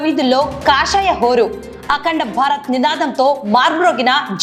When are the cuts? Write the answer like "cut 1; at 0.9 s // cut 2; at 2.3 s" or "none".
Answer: none